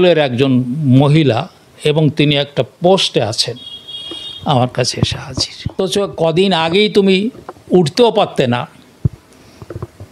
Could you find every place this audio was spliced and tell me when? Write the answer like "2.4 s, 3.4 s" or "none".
5.8 s